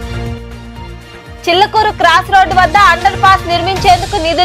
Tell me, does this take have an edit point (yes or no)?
no